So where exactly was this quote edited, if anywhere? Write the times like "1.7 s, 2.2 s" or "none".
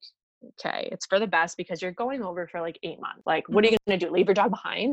3.1 s, 3.8 s